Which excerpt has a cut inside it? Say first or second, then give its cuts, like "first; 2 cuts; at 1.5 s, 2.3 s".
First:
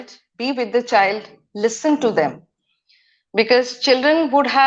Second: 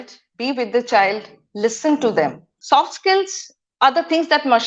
second; 1 cut; at 2.5 s